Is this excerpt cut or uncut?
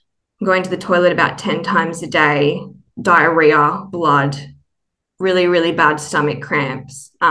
uncut